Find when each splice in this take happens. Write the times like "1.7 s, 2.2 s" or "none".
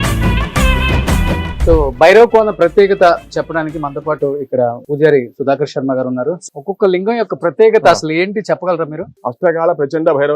1.5 s, 6.4 s, 9.1 s